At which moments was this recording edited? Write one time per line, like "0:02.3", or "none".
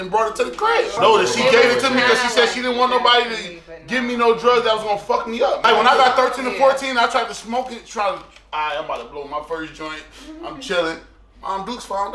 0:01.0
0:05.6